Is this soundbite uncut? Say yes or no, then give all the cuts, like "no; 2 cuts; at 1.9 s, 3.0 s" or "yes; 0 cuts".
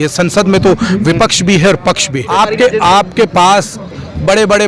no; 1 cut; at 2.3 s